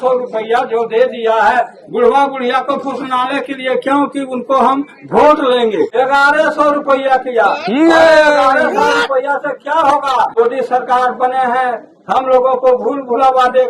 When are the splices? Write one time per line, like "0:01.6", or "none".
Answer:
0:05.9
0:10.3